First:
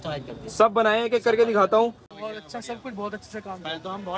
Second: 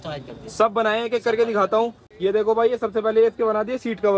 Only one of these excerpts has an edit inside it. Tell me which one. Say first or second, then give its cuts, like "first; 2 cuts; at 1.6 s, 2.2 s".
first; 1 cut; at 2.1 s